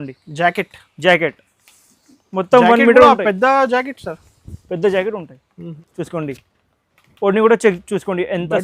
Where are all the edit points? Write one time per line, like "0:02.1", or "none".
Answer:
0:05.6

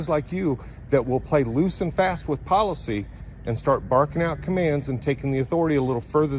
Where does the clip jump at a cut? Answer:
none

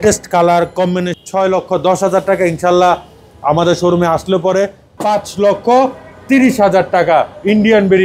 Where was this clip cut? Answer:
0:01.1
0:04.9

